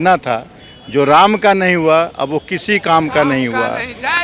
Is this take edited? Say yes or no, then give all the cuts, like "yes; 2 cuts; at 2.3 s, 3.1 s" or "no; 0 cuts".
no; 0 cuts